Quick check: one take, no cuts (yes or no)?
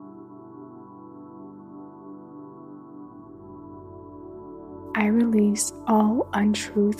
yes